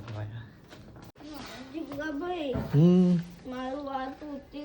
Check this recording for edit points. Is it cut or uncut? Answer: cut